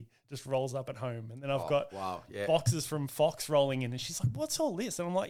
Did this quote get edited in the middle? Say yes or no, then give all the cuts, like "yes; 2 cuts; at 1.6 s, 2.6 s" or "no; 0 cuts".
no; 0 cuts